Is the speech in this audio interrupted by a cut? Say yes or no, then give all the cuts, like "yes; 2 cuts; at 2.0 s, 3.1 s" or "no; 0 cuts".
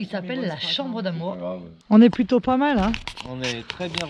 yes; 1 cut; at 1.8 s